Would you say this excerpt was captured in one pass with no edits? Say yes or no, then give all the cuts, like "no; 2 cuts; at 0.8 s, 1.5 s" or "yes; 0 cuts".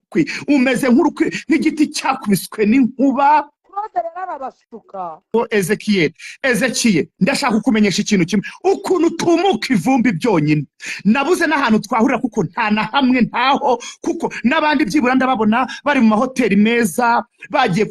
no; 1 cut; at 5.3 s